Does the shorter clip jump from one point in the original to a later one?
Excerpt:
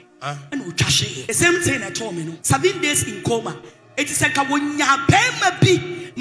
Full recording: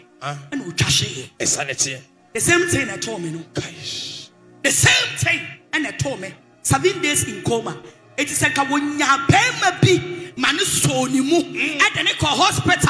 yes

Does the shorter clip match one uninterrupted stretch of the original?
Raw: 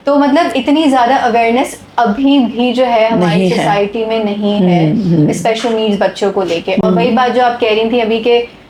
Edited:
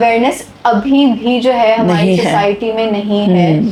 yes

